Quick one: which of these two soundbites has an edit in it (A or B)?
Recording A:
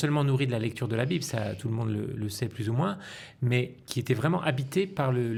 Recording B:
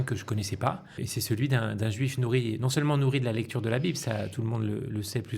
B